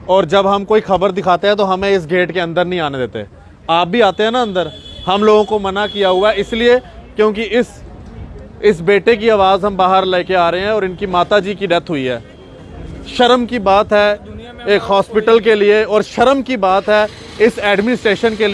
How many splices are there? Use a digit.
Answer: 0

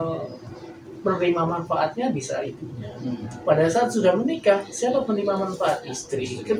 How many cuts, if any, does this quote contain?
0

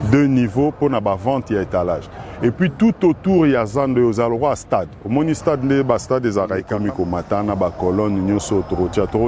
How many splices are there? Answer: 1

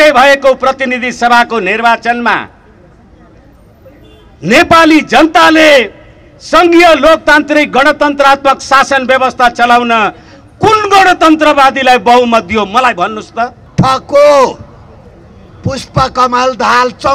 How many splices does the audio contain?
1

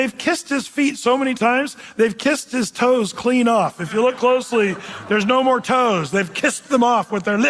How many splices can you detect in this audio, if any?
0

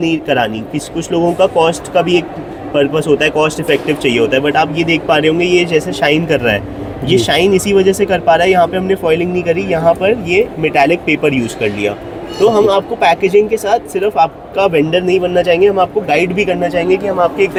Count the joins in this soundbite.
0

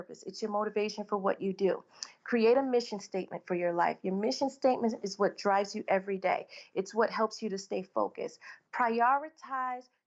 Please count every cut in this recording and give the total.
0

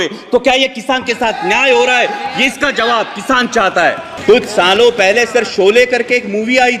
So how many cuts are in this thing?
1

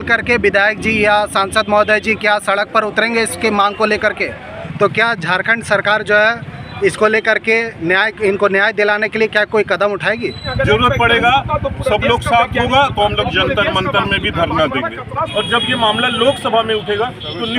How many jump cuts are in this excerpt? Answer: 3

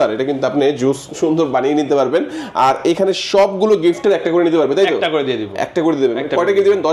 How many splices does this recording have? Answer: 0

